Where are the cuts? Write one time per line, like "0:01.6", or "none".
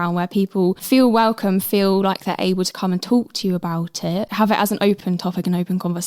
0:00.8
0:04.3
0:05.0